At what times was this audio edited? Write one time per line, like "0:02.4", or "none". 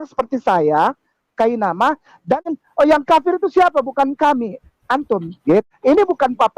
0:02.6
0:05.7